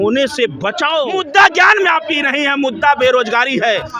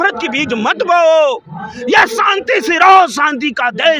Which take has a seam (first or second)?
first